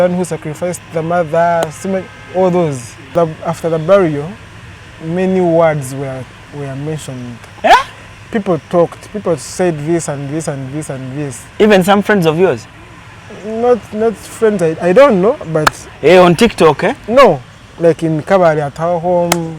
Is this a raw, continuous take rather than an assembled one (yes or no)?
no